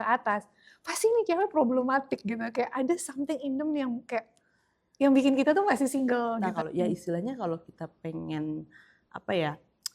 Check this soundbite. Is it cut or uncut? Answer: cut